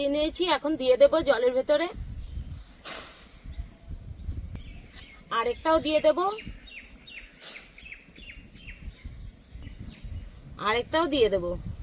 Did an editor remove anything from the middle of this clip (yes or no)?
no